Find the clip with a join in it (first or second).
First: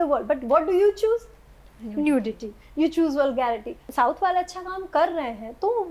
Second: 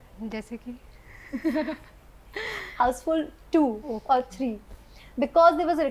first